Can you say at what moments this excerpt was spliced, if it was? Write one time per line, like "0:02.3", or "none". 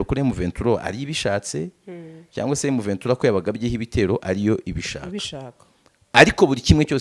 none